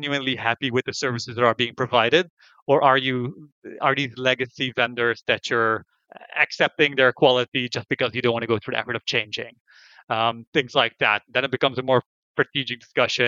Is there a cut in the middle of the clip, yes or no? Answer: no